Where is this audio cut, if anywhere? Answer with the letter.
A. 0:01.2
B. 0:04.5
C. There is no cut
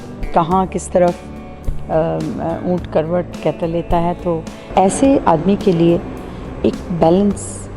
B